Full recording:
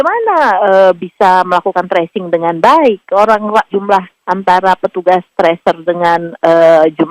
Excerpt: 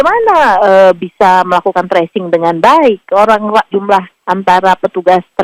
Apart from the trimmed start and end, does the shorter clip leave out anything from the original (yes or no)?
no